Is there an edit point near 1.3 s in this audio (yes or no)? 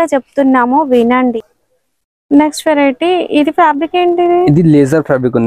yes